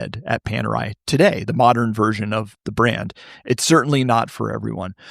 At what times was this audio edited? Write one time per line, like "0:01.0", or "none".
0:02.5